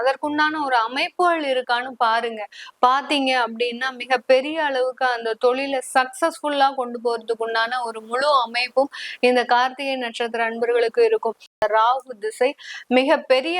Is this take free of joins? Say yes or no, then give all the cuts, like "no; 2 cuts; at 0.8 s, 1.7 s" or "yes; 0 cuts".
no; 1 cut; at 11.6 s